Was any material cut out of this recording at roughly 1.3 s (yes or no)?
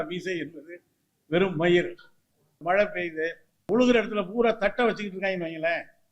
no